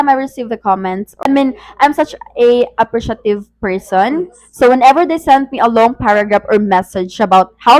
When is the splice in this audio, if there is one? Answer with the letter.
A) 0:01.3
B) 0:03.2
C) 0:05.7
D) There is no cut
A